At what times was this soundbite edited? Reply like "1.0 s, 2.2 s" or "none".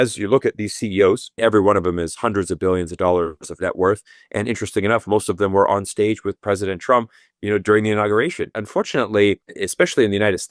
1.3 s, 8.6 s, 9.6 s